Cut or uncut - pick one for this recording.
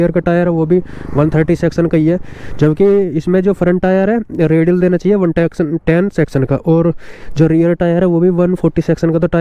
uncut